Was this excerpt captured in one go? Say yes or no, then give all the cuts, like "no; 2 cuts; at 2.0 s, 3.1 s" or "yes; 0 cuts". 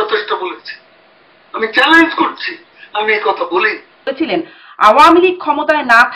no; 1 cut; at 4.0 s